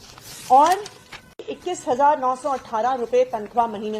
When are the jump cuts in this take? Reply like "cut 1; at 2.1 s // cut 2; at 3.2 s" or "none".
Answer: cut 1; at 1.4 s